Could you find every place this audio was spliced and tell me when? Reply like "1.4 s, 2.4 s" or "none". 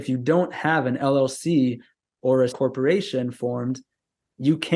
2.5 s